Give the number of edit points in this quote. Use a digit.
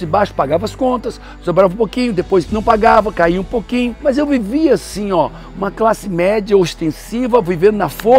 0